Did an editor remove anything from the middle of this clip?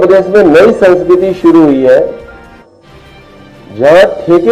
no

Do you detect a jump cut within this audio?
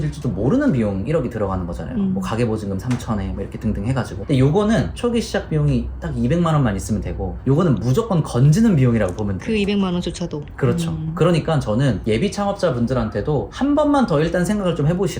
no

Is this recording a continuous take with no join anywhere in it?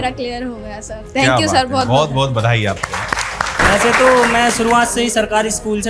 no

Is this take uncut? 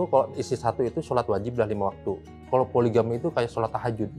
yes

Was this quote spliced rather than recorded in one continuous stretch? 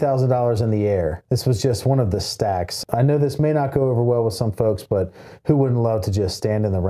yes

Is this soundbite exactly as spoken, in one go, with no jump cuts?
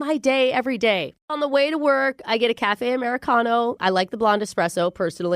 no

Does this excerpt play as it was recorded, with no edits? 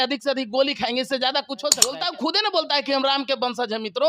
no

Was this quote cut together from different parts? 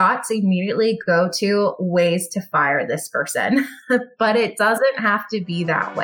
no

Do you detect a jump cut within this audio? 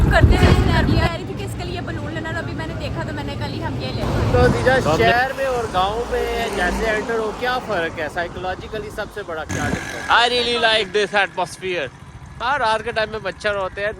yes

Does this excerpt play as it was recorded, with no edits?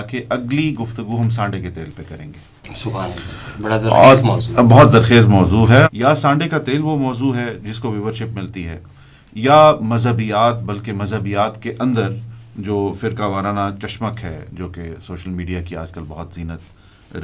no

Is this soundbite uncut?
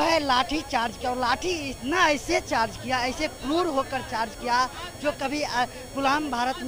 yes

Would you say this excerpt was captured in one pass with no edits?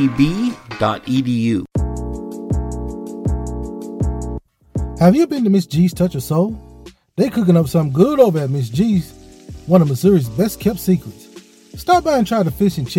no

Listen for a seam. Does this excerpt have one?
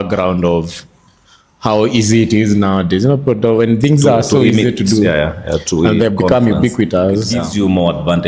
yes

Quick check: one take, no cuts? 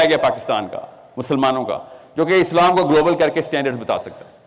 yes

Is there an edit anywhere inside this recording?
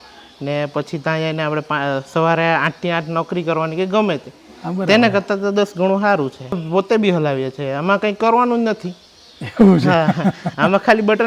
yes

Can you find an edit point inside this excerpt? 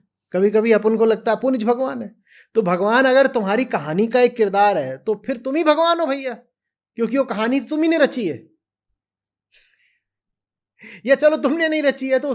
no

